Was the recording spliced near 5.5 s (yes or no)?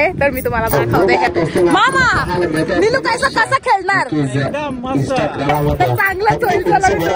yes